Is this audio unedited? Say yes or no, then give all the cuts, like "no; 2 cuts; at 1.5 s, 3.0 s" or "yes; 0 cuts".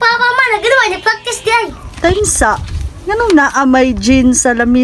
no; 1 cut; at 1.8 s